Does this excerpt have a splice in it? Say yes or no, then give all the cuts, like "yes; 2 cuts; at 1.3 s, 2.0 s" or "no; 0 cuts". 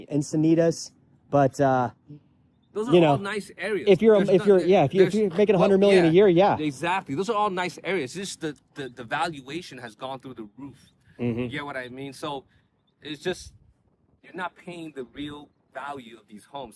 no; 0 cuts